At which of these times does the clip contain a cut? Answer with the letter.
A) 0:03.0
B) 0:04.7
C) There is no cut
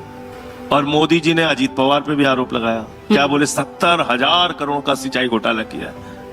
A